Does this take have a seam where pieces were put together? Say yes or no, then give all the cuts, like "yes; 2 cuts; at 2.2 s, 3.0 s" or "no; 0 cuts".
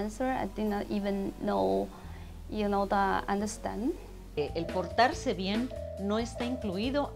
yes; 1 cut; at 4.4 s